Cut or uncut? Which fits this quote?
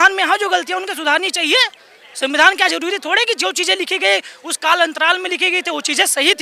uncut